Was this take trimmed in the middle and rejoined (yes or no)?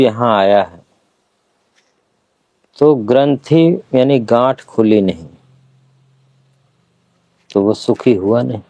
no